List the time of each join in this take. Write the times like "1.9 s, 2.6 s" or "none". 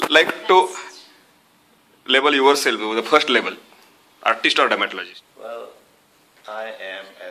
5.0 s